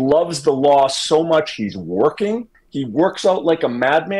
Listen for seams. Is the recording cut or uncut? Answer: uncut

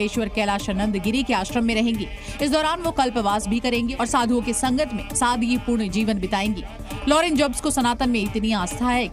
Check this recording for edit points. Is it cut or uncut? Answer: uncut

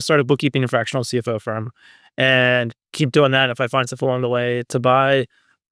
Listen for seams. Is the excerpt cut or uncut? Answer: uncut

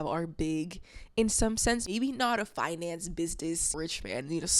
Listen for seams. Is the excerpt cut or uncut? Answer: cut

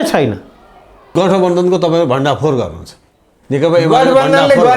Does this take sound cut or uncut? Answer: cut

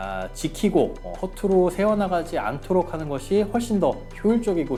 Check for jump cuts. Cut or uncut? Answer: uncut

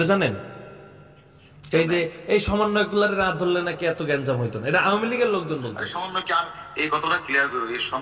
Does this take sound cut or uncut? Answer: uncut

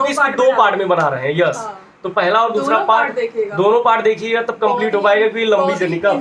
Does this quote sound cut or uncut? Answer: uncut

